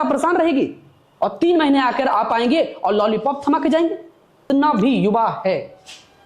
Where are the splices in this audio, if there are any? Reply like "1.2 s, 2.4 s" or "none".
4.3 s